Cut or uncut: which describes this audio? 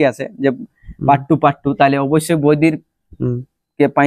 uncut